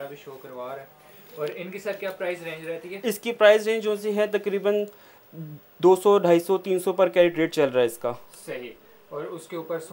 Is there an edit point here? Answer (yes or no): no